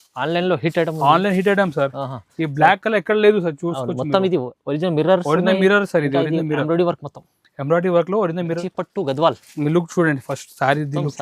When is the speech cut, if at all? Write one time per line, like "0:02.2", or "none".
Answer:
0:08.6